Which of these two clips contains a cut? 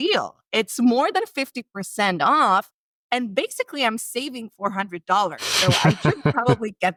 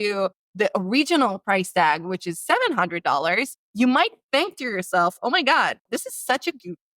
second; 2 cuts; at 3.6 s, 5.8 s

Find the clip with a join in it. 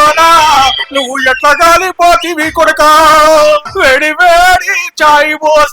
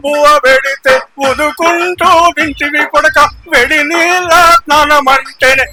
first; 1 cut; at 3.7 s

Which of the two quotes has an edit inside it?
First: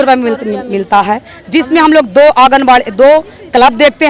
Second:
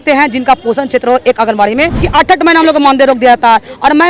second; 1 cut; at 2.1 s

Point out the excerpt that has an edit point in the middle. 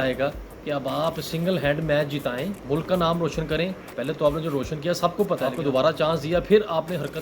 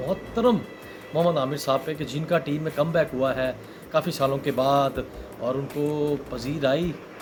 first; 2 cuts; at 2.6 s, 5.5 s

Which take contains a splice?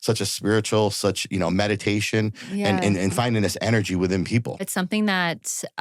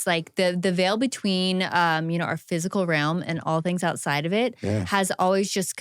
first; 1 cut; at 4.7 s

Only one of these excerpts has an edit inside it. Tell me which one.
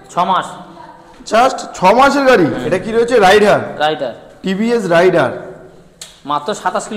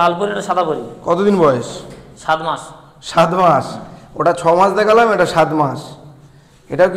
first; 1 cut; at 2.6 s

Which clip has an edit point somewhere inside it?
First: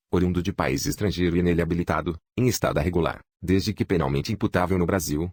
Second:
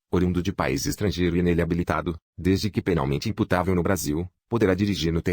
second; 2 cuts; at 2.2 s, 4.3 s

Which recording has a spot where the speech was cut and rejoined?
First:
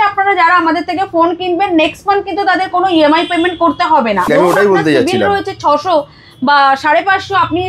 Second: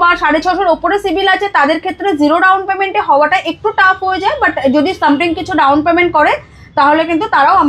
first; 1 cut; at 4.3 s

